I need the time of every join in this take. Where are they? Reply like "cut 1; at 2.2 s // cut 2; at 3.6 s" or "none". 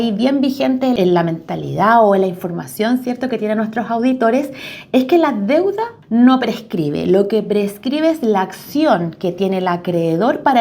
cut 1; at 1.0 s // cut 2; at 5.9 s

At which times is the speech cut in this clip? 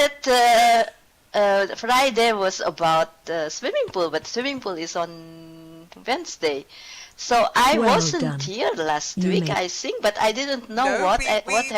cut 1; at 6.6 s

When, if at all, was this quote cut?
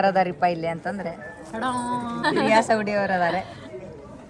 cut 1; at 2.2 s

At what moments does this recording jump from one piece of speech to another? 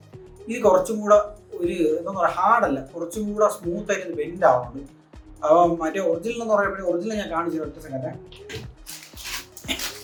none

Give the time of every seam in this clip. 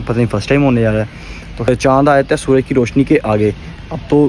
cut 1; at 1.7 s

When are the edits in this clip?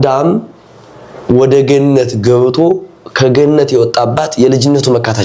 none

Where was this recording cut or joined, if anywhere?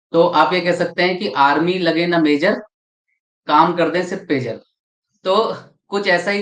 none

